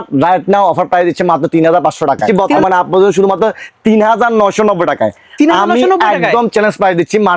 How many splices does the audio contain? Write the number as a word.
one